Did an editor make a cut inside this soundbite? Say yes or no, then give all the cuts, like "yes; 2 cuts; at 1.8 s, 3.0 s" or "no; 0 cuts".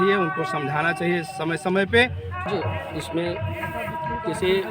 yes; 1 cut; at 2.4 s